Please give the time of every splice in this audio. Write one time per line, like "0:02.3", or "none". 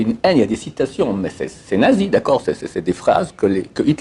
none